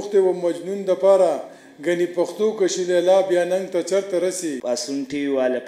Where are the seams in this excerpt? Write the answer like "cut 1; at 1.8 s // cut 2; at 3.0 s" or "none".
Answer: cut 1; at 4.6 s